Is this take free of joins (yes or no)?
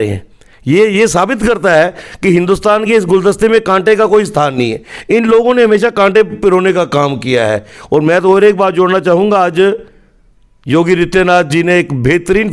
yes